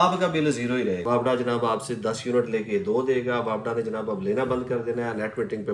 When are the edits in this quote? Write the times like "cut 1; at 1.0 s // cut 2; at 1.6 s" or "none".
cut 1; at 1.0 s